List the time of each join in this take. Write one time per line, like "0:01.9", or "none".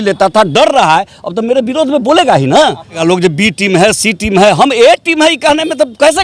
0:03.0